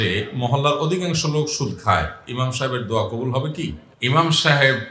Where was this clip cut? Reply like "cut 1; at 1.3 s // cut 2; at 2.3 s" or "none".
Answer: none